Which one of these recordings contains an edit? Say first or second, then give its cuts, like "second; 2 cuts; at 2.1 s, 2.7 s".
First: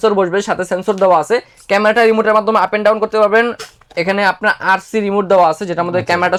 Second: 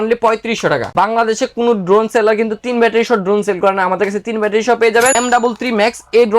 second; 2 cuts; at 0.9 s, 5.1 s